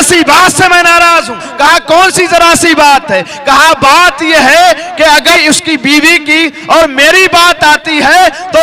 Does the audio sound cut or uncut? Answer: uncut